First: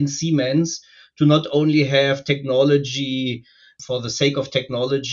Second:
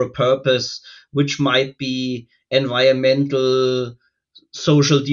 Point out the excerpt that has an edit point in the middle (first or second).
first